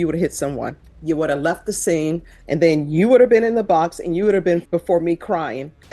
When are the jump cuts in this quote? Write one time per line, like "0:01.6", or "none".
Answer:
0:00.9
0:02.3
0:04.6